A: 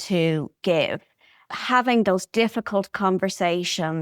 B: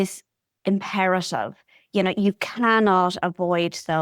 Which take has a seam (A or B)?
A